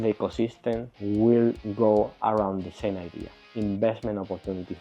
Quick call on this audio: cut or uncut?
cut